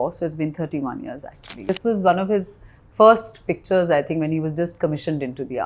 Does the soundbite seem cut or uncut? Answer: cut